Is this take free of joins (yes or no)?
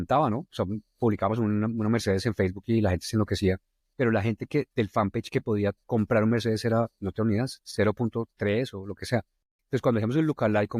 yes